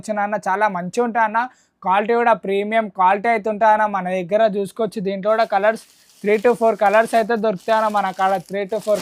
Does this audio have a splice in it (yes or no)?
no